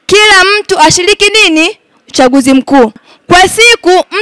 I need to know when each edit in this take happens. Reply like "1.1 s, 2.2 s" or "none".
3.1 s